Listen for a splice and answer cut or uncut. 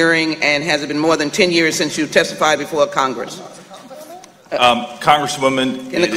uncut